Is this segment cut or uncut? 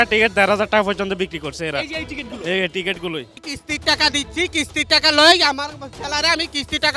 cut